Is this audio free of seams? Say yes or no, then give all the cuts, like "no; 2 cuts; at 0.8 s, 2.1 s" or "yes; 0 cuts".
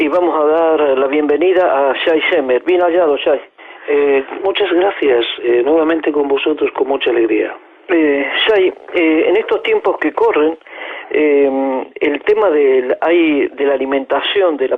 yes; 0 cuts